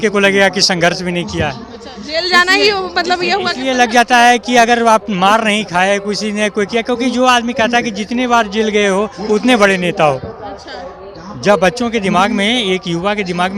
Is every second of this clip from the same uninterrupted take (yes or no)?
yes